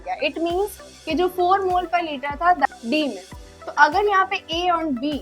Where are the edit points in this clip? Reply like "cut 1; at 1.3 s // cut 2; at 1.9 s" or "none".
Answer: cut 1; at 2.7 s

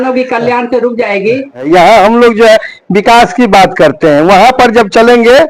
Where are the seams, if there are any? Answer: cut 1; at 1.6 s

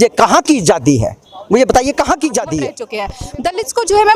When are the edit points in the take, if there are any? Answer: cut 1; at 3.2 s

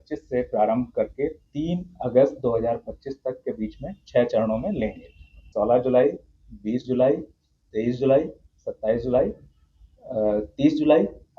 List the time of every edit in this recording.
cut 1; at 5.4 s

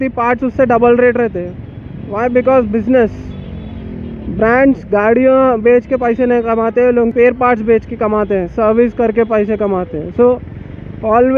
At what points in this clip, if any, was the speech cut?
none

